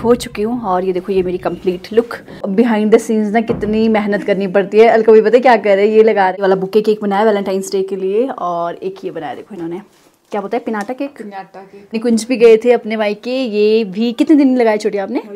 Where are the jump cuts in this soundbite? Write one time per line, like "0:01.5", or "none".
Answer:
0:02.5
0:06.3
0:12.0